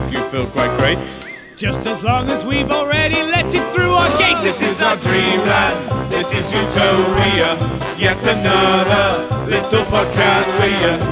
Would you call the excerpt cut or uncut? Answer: uncut